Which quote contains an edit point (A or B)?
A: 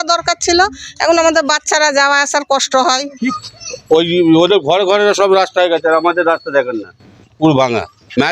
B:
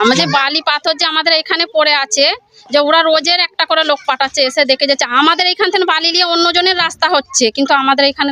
A